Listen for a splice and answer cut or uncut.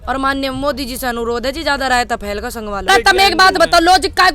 cut